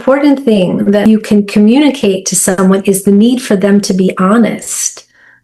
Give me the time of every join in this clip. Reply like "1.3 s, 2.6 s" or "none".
1.0 s

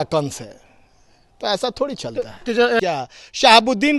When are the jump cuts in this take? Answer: 2.8 s

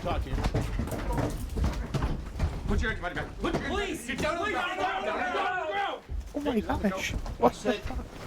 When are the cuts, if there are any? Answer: none

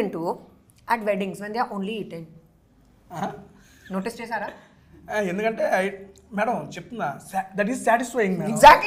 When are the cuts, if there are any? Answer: none

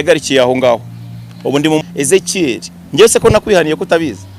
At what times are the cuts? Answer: 1.8 s

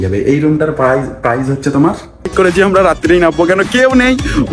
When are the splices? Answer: 2.3 s

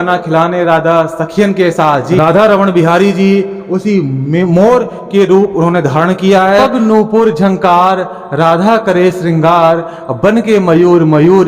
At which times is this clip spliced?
2.2 s, 6.7 s

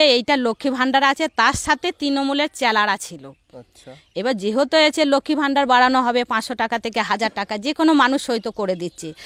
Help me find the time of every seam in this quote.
none

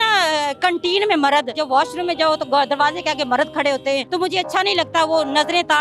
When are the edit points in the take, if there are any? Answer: 1.6 s, 4.1 s

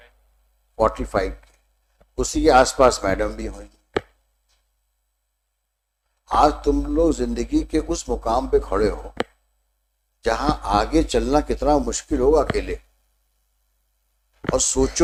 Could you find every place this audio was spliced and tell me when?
none

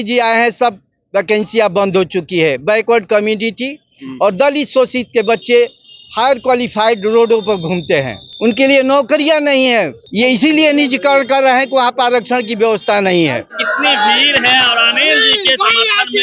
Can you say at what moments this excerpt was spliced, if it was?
8.2 s, 10.0 s, 13.6 s

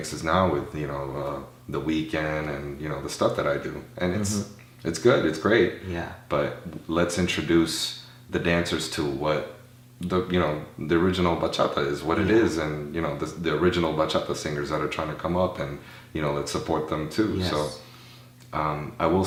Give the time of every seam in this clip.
none

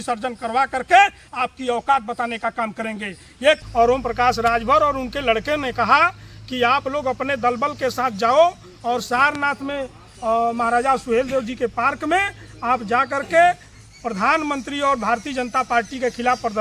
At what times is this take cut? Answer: 3.6 s

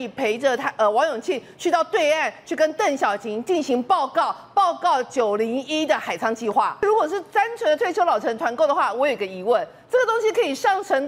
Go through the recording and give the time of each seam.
6.8 s

